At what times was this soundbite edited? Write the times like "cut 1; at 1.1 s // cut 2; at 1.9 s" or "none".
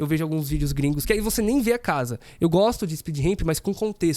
cut 1; at 1.0 s